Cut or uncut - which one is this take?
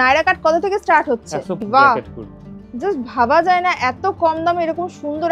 cut